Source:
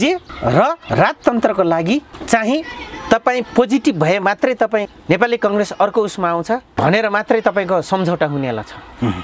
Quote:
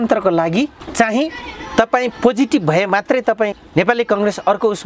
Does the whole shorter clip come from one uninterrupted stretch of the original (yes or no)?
yes